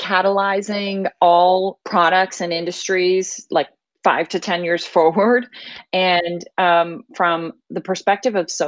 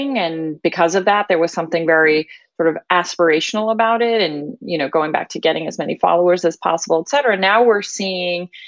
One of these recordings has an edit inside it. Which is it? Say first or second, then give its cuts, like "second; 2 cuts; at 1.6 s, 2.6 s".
first; 2 cuts; at 1.8 s, 3.8 s